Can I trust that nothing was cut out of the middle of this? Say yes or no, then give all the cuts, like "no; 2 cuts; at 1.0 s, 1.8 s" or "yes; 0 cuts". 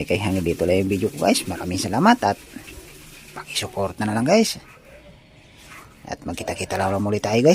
yes; 0 cuts